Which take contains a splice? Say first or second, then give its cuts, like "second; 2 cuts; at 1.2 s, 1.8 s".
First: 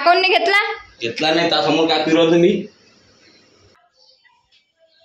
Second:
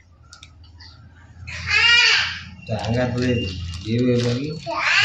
first; 1 cut; at 3.8 s